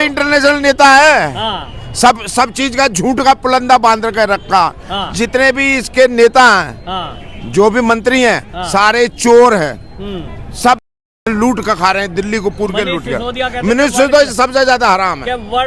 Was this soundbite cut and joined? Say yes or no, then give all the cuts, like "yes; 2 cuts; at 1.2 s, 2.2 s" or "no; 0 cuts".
no; 0 cuts